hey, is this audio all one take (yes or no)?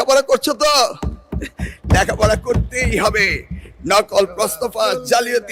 yes